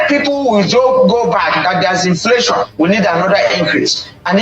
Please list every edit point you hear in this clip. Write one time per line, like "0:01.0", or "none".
0:02.7